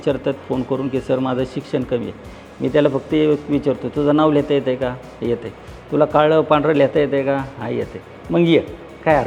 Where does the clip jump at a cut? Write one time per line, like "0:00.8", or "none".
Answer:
none